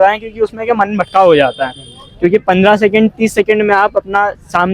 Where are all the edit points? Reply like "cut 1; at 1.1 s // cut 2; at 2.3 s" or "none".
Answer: none

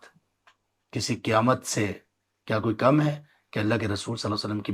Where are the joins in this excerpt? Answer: none

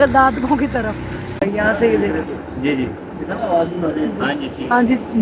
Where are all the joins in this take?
cut 1; at 1.4 s

